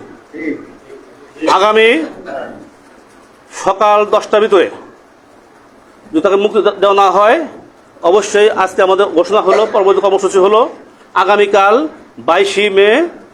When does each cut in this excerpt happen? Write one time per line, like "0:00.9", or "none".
none